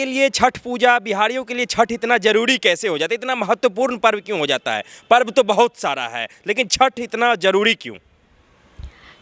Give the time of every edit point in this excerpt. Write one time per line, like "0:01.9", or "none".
none